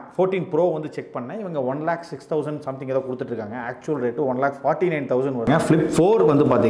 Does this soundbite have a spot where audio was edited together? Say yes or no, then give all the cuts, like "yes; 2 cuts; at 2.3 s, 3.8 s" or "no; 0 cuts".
yes; 1 cut; at 5.5 s